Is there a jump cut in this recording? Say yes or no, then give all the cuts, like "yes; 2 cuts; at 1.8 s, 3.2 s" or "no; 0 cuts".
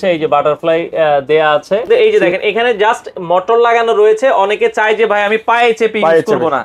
yes; 1 cut; at 2.1 s